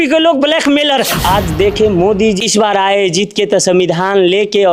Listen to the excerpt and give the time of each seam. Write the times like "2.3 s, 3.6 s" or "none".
1.1 s, 2.4 s